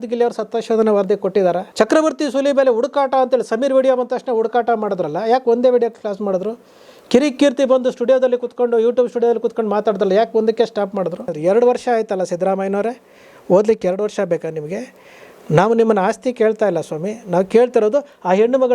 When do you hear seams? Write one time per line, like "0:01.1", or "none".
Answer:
0:01.7
0:11.3